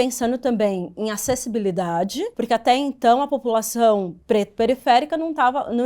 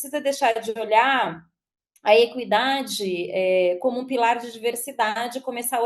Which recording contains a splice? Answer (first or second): first